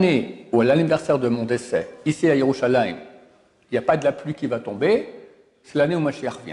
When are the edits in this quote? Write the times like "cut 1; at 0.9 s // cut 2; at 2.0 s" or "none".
none